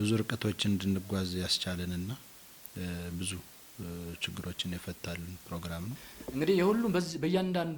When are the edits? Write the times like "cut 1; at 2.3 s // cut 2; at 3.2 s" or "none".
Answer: cut 1; at 6.3 s